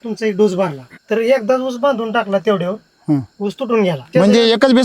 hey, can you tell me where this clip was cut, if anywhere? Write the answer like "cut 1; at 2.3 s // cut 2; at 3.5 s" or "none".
cut 1; at 1.0 s // cut 2; at 4.1 s